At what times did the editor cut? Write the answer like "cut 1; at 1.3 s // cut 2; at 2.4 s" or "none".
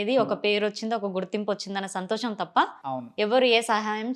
none